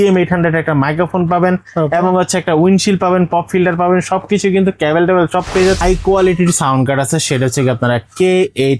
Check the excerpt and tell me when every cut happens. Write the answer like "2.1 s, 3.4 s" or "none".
5.8 s